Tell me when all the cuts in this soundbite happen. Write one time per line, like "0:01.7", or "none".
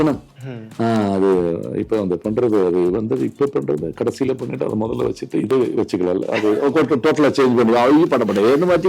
none